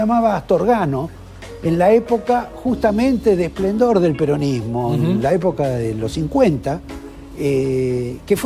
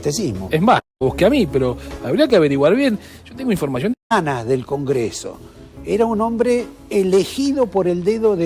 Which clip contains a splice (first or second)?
second